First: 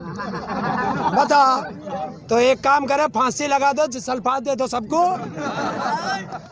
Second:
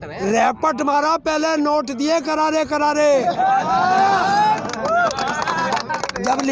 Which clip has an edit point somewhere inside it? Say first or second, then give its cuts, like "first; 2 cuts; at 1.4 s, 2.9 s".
first; 1 cut; at 2.1 s